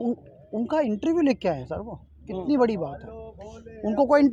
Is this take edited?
no; 0 cuts

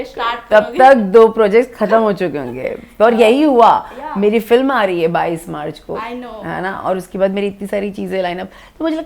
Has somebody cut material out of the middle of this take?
no; 0 cuts

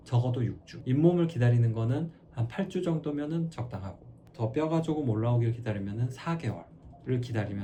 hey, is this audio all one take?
yes; 0 cuts

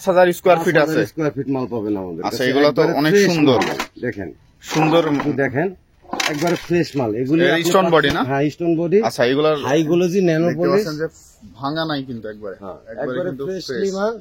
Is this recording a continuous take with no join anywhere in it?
yes; 0 cuts

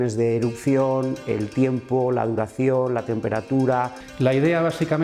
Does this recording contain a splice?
yes; 1 cut; at 4.0 s

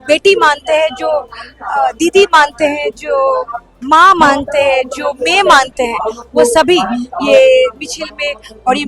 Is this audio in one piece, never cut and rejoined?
yes; 0 cuts

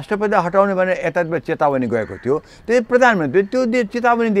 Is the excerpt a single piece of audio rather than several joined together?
yes; 0 cuts

